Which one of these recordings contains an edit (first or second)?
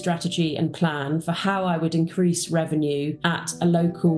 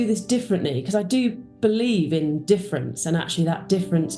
first